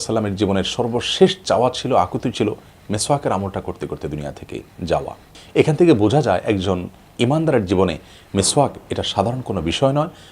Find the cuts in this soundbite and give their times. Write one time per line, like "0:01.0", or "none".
0:05.3